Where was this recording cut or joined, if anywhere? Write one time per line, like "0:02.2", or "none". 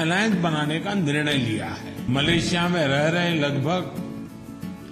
0:02.1